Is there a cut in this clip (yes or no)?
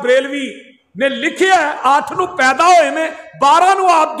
yes